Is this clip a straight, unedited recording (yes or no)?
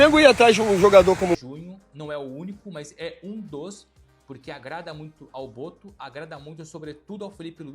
no